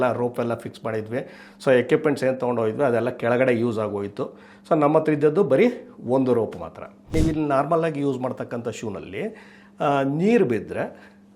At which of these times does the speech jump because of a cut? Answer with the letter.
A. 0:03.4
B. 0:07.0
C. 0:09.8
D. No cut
B